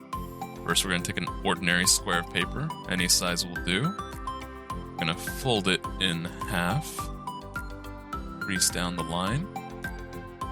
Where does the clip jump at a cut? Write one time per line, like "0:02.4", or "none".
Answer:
0:09.5